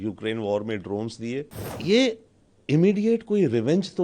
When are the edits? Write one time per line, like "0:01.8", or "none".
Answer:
0:01.6